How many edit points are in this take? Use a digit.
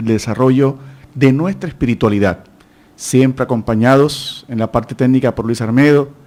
0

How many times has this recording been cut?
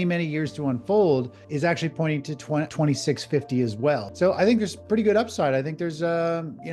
3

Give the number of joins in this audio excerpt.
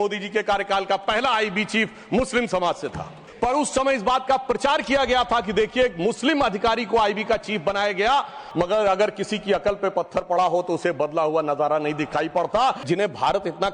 3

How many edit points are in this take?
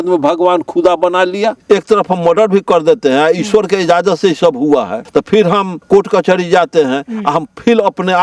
2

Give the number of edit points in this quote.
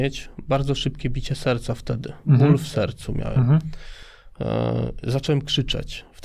0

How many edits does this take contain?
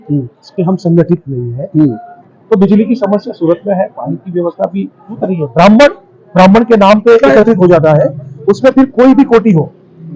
2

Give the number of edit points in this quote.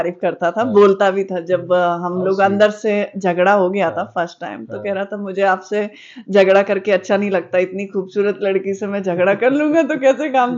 0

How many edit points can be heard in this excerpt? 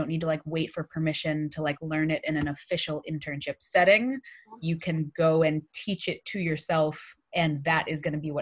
0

